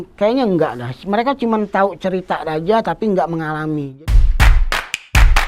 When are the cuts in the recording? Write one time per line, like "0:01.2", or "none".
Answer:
0:03.9

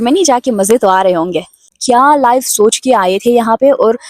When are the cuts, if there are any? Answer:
0:01.8

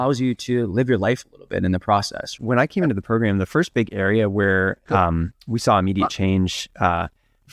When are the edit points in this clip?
0:02.3

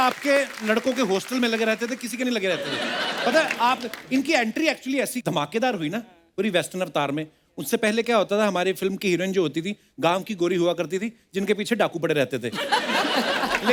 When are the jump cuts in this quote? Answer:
none

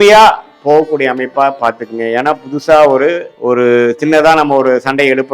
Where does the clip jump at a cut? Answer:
0:03.3

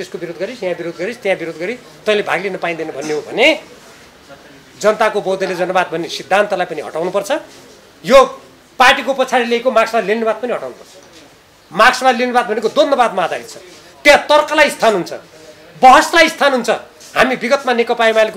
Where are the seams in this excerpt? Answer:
none

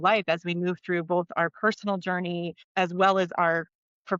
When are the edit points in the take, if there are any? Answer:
0:02.6

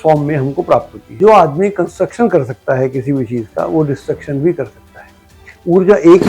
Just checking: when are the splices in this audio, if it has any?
0:01.0

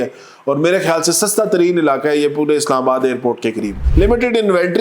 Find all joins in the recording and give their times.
0:03.8

